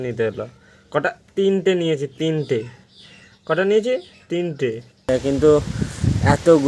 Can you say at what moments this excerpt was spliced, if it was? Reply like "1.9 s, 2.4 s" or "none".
5.0 s